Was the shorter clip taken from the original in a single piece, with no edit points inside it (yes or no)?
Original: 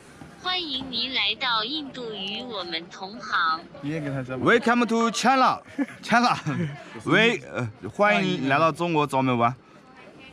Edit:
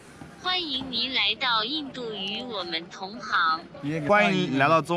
no